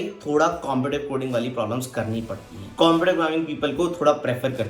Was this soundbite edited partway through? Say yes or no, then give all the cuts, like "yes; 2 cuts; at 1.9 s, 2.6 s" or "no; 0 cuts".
yes; 1 cut; at 2.6 s